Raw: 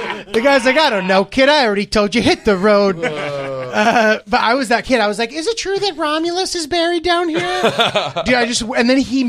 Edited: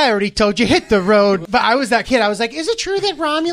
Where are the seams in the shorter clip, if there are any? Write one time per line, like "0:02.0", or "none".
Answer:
0:01.4

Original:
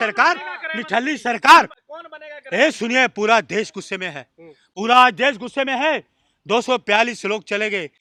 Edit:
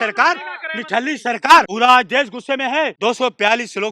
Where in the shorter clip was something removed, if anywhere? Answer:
0:01.7
0:02.9

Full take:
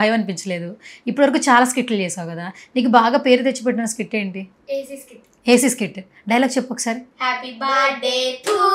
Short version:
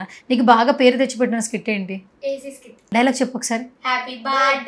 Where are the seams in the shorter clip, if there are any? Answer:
0:02.7

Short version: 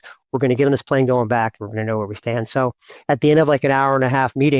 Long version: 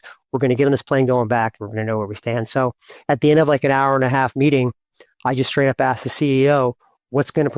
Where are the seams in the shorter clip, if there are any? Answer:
none

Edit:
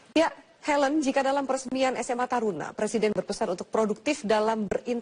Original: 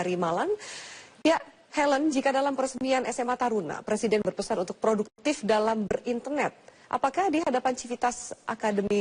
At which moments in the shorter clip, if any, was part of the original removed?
0:04.0

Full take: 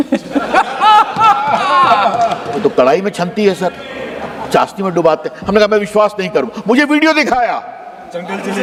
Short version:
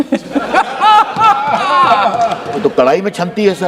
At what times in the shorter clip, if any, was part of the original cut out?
none

